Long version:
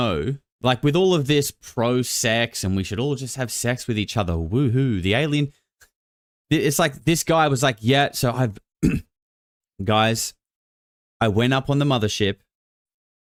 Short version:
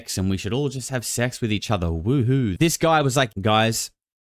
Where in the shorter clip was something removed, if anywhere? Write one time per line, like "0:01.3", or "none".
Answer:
0:02.5
0:03.3